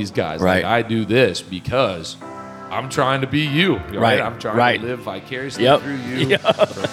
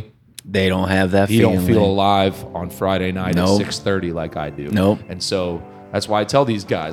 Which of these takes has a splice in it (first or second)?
second